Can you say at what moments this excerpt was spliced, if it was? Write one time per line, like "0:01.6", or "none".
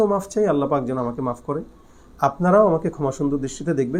none